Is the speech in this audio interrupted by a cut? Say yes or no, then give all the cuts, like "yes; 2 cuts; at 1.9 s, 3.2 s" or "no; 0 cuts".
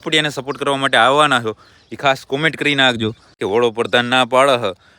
yes; 1 cut; at 3.3 s